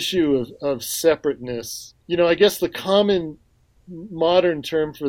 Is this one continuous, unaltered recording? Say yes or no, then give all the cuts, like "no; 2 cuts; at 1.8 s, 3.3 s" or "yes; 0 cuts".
no; 1 cut; at 1.9 s